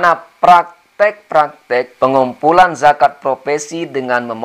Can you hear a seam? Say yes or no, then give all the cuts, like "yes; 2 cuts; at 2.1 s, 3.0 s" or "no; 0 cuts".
yes; 1 cut; at 1.9 s